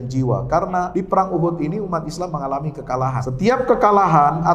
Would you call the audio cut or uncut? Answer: cut